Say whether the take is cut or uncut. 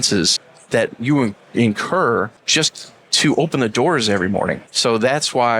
cut